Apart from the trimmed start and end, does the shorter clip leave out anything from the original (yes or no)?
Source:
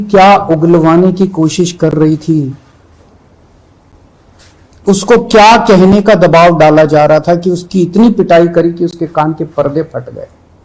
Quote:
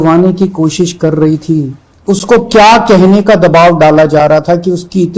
yes